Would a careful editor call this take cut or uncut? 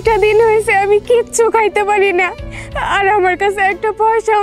uncut